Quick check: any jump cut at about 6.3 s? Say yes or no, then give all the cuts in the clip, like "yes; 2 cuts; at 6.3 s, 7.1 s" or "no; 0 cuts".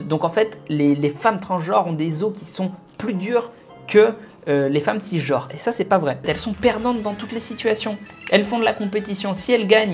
yes; 1 cut; at 6.3 s